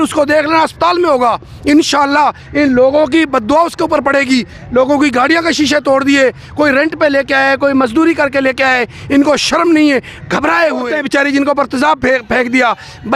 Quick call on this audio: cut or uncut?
cut